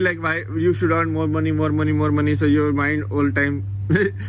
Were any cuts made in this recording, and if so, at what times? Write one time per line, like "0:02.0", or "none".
none